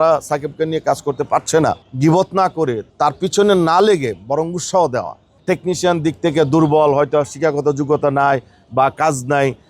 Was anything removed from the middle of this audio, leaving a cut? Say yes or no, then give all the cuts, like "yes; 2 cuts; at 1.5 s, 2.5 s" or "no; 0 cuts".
yes; 3 cuts; at 1.9 s, 2.9 s, 5.3 s